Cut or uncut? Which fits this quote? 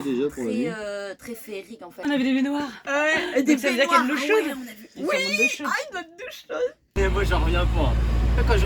cut